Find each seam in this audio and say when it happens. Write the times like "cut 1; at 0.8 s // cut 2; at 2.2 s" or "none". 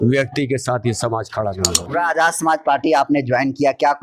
cut 1; at 1.8 s